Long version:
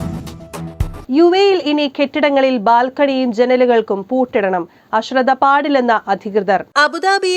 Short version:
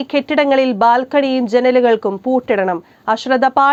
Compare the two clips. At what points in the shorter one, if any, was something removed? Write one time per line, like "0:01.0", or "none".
none